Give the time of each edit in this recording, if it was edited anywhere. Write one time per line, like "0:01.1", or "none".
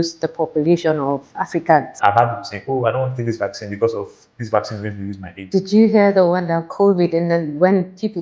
0:01.9
0:05.3